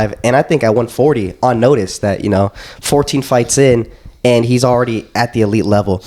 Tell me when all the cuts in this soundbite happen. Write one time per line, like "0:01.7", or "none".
none